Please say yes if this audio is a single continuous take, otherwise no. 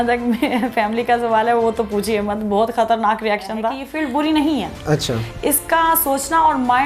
no